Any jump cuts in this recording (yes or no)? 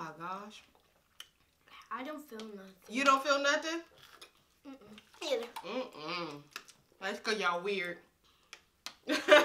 no